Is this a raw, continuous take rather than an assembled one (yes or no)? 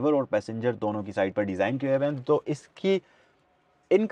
yes